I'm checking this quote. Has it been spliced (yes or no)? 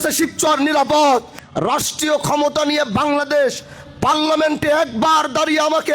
yes